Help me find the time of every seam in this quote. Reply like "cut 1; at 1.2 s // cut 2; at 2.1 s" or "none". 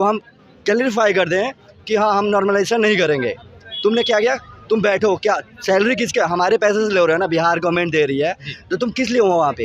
none